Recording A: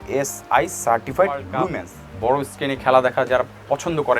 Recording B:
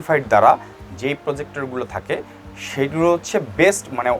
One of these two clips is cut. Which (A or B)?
A